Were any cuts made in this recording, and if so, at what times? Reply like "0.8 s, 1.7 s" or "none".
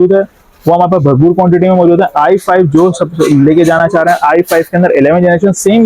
none